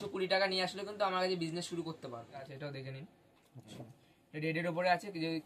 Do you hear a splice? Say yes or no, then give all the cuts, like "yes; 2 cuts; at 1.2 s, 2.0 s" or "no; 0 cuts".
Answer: yes; 1 cut; at 2.5 s